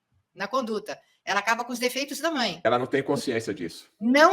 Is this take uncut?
no; 1 cut; at 2.6 s

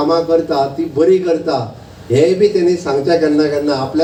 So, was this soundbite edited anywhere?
no; 0 cuts

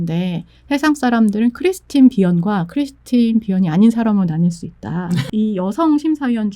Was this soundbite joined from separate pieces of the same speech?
yes; 1 cut; at 5.2 s

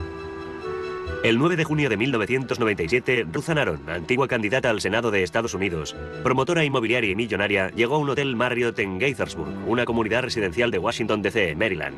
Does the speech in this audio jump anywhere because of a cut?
no; 0 cuts

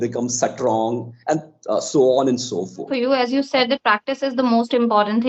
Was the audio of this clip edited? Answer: yes; 1 cut; at 2.9 s

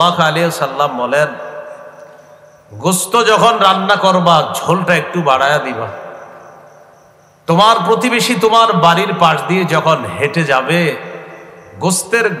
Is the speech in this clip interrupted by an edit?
no; 0 cuts

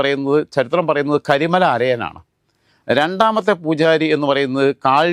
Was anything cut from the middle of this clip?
no; 0 cuts

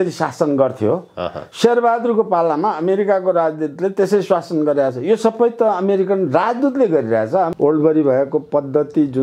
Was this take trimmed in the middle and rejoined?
yes; 1 cut; at 7.5 s

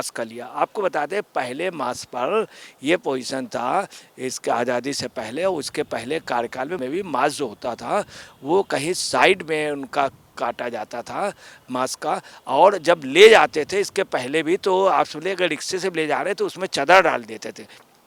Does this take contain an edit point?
no; 0 cuts

